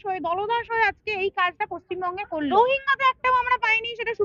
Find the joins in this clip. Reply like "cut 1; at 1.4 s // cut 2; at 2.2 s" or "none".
cut 1; at 2.5 s